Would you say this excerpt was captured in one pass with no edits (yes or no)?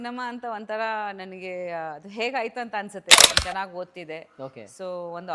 no